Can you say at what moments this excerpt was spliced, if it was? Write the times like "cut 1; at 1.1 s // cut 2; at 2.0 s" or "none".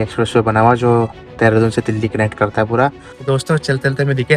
cut 1; at 3.1 s